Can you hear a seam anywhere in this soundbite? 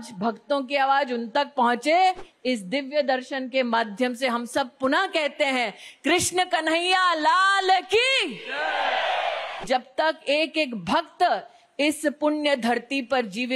yes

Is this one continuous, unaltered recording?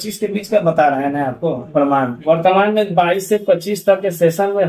no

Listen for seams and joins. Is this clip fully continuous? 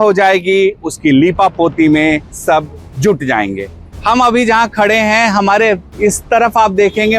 yes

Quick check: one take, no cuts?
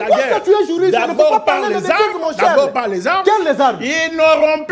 yes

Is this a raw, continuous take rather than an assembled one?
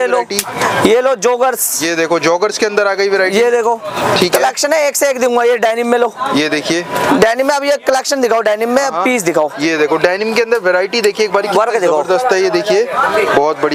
yes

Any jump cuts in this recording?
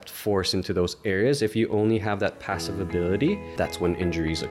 yes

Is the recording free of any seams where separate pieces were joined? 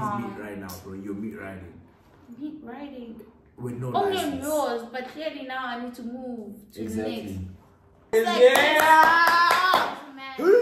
no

